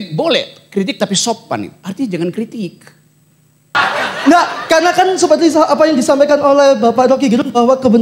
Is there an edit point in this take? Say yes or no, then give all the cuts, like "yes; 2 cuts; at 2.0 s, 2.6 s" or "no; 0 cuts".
yes; 1 cut; at 3.7 s